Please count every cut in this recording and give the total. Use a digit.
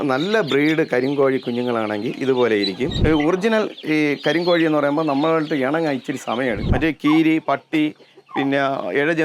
2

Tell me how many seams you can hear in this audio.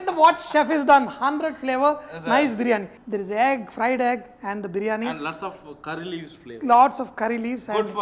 1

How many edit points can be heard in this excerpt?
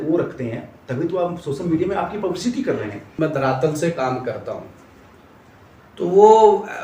1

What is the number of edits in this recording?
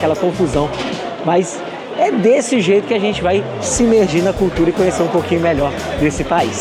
0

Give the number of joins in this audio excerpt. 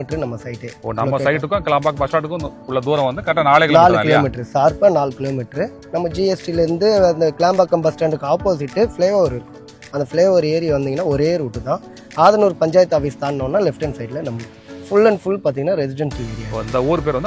0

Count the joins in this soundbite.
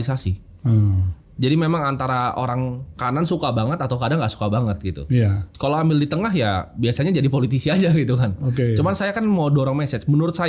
0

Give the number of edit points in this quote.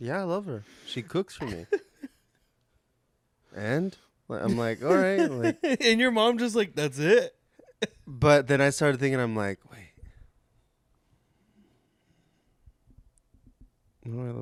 0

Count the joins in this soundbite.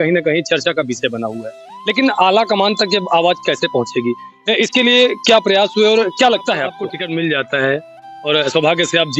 1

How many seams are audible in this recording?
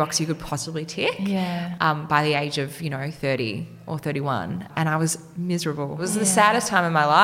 1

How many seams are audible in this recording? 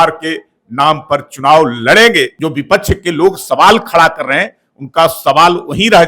1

